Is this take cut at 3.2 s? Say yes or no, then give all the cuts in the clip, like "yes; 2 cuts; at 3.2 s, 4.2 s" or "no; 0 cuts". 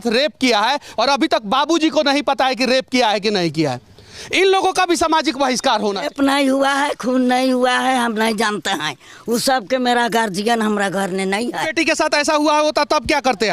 no; 3 cuts; at 0.9 s, 6.1 s, 11.7 s